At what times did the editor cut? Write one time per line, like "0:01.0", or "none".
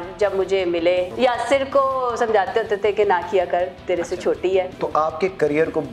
0:01.1
0:04.7